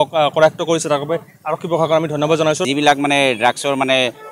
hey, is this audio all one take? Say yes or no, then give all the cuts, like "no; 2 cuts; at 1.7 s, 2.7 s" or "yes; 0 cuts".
no; 1 cut; at 2.6 s